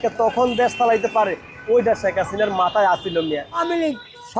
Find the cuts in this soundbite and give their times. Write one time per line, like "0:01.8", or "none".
0:03.5